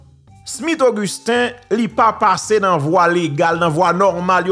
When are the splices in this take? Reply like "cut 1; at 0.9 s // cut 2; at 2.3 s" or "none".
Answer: none